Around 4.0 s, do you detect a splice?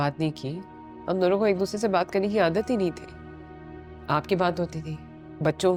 no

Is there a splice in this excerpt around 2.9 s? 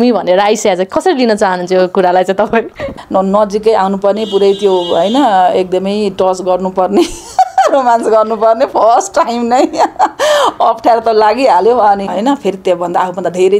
yes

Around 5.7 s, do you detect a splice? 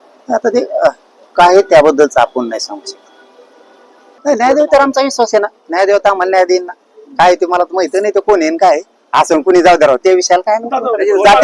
no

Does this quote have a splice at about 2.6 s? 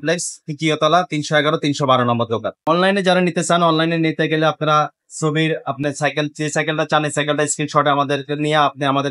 yes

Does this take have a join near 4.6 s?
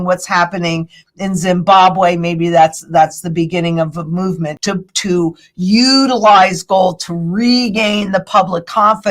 yes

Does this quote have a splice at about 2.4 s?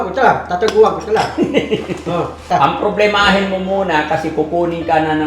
yes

